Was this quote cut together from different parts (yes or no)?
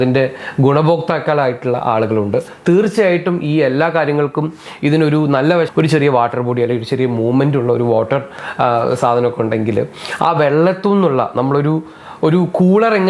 yes